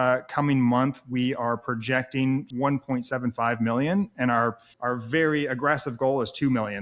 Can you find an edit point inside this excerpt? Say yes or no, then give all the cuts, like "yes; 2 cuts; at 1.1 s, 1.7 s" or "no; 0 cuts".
yes; 2 cuts; at 2.5 s, 4.7 s